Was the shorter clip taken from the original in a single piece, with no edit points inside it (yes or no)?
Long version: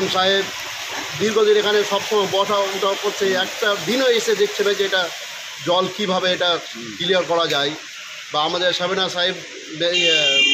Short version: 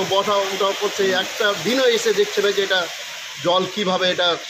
yes